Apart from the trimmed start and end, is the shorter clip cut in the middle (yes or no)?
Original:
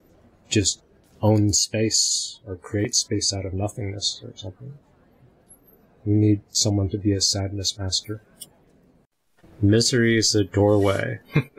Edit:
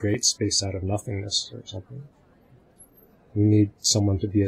no